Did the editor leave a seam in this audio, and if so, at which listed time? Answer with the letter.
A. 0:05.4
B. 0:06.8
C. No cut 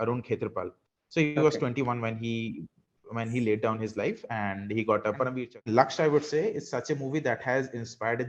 A